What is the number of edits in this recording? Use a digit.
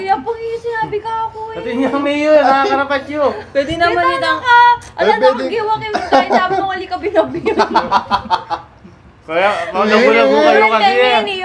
0